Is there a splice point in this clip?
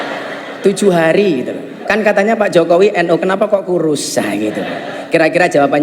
yes; 1 cut; at 1.7 s

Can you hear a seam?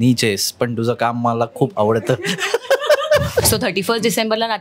yes; 1 cut; at 3.5 s

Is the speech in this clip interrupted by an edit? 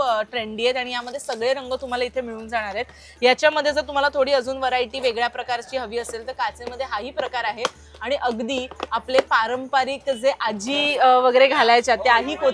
no; 0 cuts

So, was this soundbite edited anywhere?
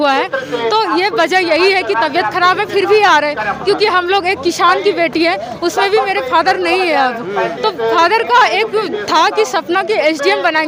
no; 0 cuts

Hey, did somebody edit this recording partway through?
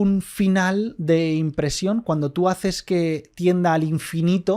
no; 0 cuts

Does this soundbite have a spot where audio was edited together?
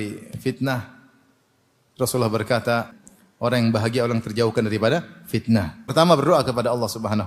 yes; 2 cuts; at 2.9 s, 5.8 s

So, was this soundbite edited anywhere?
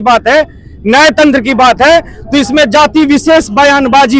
no; 0 cuts

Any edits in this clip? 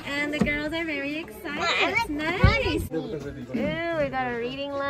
no; 0 cuts

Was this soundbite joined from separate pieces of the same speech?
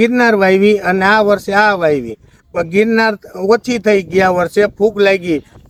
no; 0 cuts

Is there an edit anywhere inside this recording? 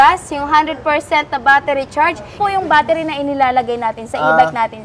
yes; 1 cut; at 2.4 s

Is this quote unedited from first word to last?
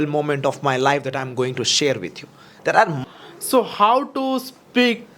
no; 1 cut; at 3.0 s

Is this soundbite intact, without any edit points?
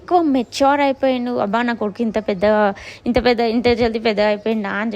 yes; 0 cuts

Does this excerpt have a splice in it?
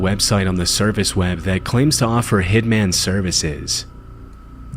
yes; 1 cut; at 2.3 s

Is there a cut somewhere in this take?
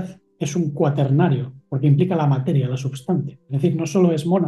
yes; 1 cut; at 3.4 s

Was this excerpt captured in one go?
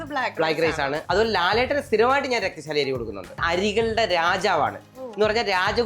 no; 2 cuts; at 1.0 s, 3.4 s

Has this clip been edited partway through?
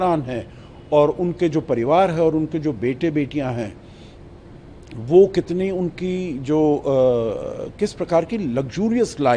no; 0 cuts

